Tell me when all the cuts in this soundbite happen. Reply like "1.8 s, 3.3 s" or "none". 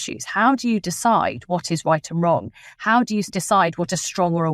3.3 s